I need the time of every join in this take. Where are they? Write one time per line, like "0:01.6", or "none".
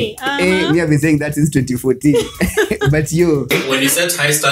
0:03.5

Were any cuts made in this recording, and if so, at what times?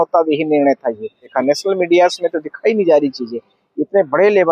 0:01.3

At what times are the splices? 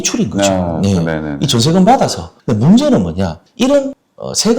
0:02.3

